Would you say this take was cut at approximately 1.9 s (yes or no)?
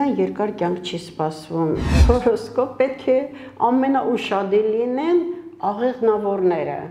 yes